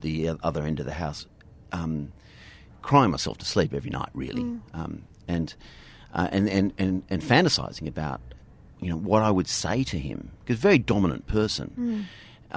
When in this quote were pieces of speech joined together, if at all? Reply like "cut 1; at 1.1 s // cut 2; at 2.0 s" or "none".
none

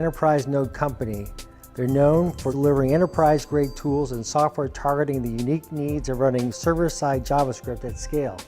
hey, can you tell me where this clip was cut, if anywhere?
cut 1; at 2.5 s

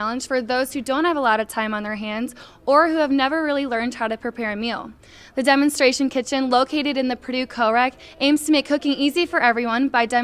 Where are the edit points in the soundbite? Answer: none

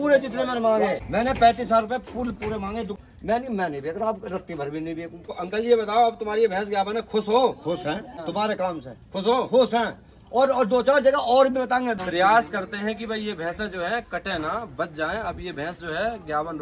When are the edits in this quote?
cut 1; at 1.0 s // cut 2; at 3.0 s // cut 3; at 5.3 s // cut 4; at 8.2 s // cut 5; at 12.0 s

